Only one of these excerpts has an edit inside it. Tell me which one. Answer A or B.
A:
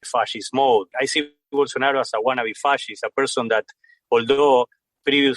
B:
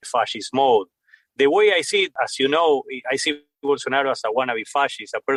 A